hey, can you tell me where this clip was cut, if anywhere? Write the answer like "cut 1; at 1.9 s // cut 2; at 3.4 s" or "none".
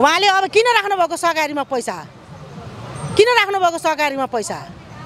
none